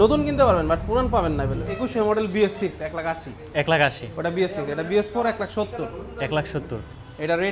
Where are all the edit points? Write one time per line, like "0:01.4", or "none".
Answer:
0:01.7